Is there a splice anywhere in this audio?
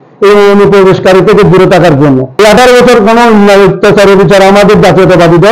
yes; 1 cut; at 2.3 s

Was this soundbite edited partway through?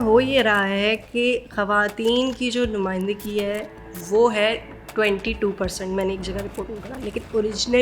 no; 0 cuts

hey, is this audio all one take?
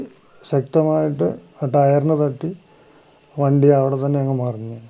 yes; 0 cuts

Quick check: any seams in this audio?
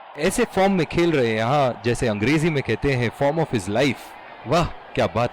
no; 0 cuts

